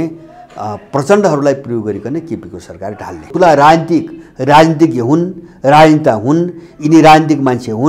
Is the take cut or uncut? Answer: cut